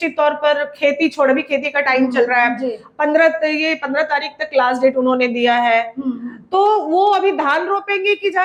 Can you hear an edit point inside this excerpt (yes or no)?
no